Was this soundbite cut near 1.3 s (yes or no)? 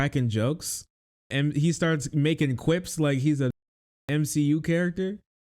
yes